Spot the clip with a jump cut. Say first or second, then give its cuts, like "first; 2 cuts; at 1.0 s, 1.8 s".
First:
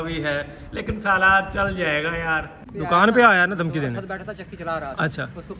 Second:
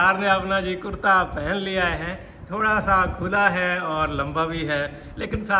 first; 1 cut; at 2.6 s